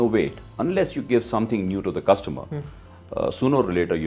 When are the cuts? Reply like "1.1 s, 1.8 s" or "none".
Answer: none